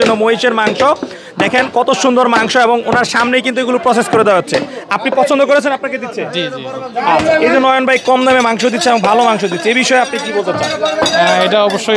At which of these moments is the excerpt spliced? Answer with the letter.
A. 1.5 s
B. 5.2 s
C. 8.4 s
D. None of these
D